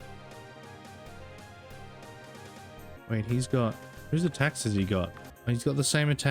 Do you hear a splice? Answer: yes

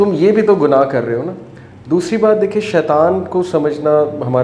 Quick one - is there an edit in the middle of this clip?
no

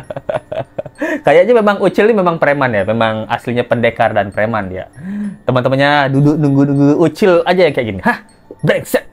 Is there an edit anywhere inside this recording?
no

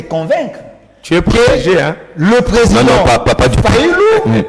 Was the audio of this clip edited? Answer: no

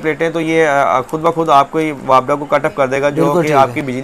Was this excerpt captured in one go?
yes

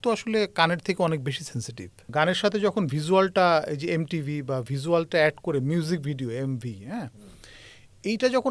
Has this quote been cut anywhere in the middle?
yes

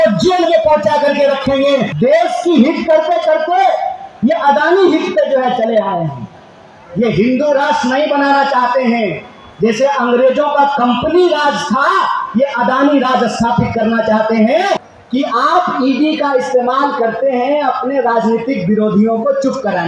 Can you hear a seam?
yes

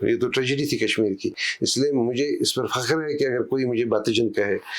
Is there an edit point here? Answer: no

